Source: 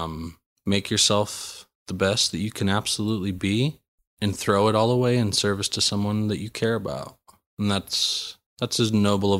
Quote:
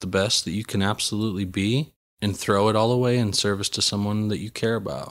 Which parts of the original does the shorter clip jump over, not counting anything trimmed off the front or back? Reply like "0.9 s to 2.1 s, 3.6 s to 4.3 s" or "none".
3.9 s to 4.0 s